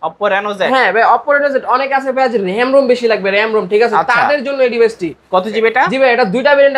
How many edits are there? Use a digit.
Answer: 0